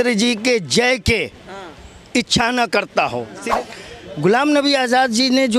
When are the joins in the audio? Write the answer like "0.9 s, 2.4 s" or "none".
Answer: 3.3 s